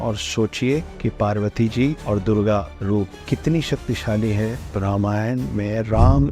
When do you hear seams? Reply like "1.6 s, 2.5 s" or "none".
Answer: 0.9 s, 2.0 s, 2.8 s, 4.7 s